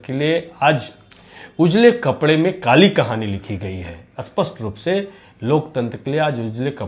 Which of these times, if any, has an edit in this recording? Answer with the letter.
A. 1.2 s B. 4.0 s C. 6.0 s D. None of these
D